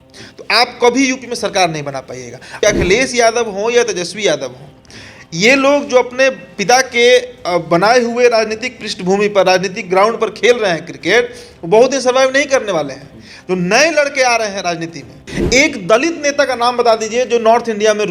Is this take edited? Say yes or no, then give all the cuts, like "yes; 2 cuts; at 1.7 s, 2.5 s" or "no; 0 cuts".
yes; 2 cuts; at 2.5 s, 15.3 s